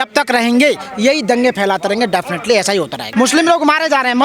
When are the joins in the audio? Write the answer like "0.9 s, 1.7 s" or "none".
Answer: 3.0 s